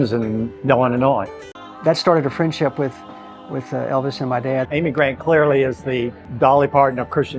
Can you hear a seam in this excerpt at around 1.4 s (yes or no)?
yes